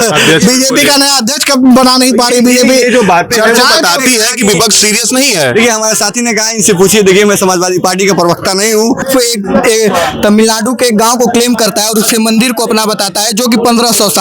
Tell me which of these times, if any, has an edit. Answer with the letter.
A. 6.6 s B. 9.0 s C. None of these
B